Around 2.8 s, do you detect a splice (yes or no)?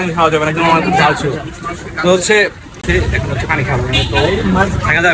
yes